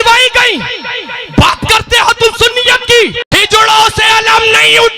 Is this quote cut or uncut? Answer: cut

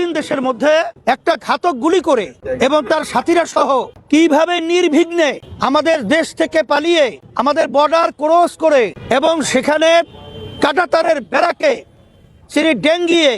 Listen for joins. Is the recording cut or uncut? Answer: cut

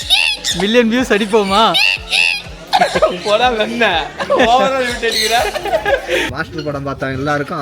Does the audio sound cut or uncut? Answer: cut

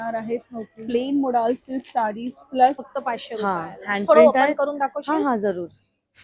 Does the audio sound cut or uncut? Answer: cut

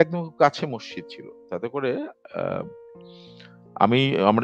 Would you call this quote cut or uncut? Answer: uncut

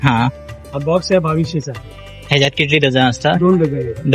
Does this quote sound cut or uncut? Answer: uncut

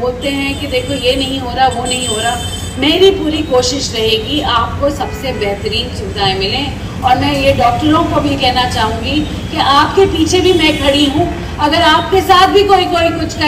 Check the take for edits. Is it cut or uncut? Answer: uncut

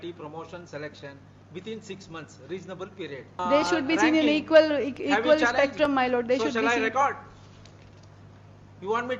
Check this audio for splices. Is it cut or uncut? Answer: cut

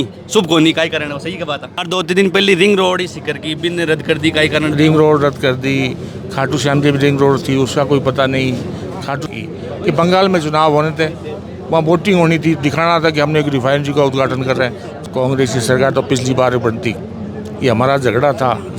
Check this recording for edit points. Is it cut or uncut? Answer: cut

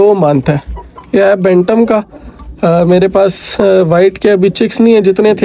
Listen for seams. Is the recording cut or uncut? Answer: uncut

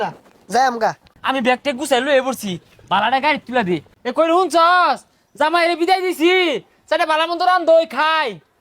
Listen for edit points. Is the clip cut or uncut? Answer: cut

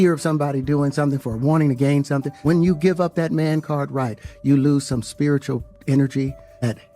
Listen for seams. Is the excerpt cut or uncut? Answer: cut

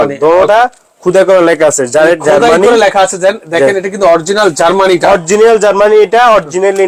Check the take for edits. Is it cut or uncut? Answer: uncut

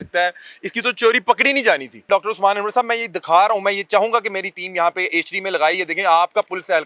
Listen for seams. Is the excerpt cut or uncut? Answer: cut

